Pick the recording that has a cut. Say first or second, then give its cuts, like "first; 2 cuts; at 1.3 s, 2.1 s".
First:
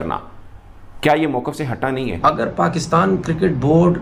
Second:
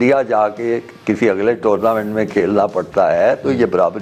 first; 1 cut; at 2.2 s